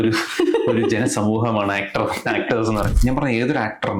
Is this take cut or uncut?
cut